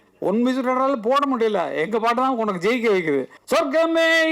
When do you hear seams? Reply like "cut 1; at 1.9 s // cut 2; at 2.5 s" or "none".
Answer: cut 1; at 3.3 s